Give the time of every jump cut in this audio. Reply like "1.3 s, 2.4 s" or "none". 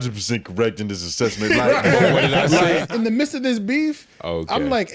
2.9 s